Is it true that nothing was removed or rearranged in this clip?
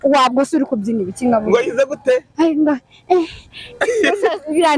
yes; 0 cuts

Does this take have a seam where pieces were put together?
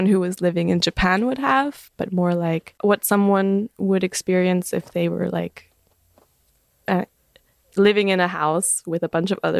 yes; 1 cut; at 2.7 s

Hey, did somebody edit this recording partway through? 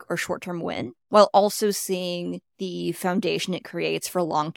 yes; 2 cuts; at 1.0 s, 2.5 s

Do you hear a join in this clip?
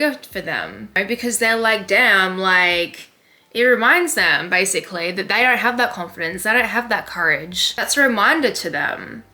no; 0 cuts

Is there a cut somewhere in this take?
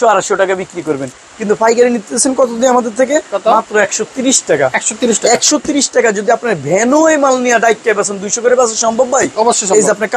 no; 0 cuts

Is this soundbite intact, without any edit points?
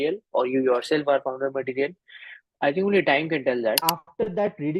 no; 1 cut; at 3.8 s

